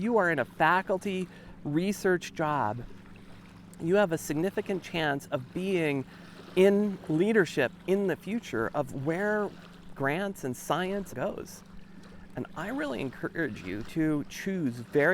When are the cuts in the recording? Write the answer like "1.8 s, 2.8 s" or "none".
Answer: 9.9 s, 11.1 s